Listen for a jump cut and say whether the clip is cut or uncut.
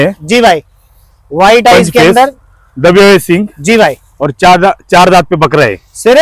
uncut